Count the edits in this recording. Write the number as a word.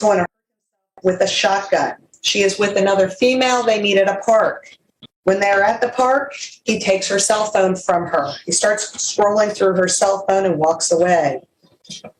zero